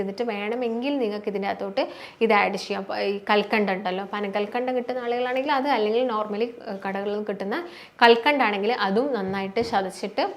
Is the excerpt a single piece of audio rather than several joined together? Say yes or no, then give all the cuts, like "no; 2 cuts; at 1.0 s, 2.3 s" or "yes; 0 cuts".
yes; 0 cuts